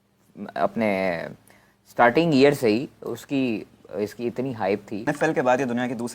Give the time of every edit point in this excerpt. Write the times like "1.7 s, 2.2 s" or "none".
5.1 s